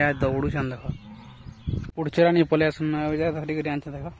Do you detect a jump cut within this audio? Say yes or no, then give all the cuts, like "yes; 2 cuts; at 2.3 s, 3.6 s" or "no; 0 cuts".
yes; 1 cut; at 1.9 s